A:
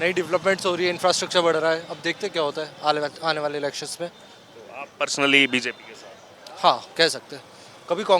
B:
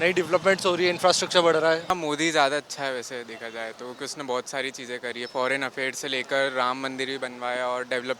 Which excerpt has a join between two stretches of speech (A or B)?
B